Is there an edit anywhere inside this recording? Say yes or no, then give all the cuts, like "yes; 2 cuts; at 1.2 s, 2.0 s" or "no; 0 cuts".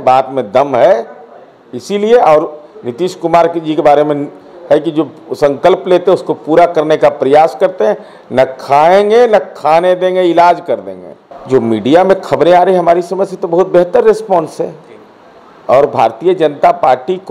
yes; 1 cut; at 11.3 s